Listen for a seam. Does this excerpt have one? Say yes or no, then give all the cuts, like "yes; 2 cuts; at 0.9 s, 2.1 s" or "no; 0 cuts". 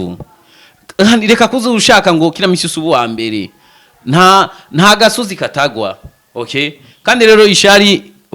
no; 0 cuts